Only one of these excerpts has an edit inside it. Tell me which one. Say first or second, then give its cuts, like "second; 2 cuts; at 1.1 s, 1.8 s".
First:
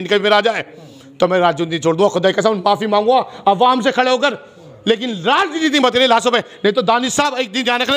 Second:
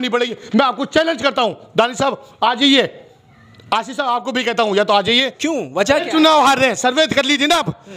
second; 1 cut; at 5.3 s